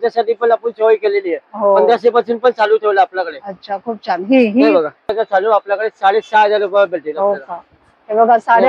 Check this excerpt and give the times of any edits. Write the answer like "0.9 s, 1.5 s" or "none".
5.1 s